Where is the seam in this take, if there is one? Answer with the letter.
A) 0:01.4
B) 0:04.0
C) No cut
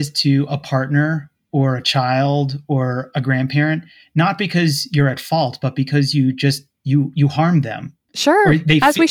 C